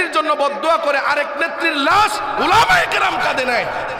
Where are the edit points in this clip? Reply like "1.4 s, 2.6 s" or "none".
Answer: none